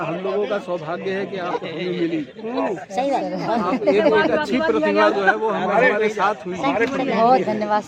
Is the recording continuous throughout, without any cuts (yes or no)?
yes